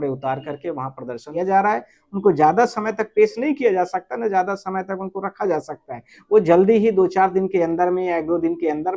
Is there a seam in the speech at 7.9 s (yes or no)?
no